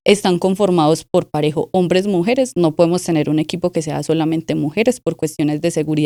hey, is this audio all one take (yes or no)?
yes